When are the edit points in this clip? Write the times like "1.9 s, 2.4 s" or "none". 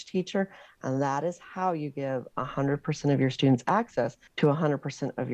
4.2 s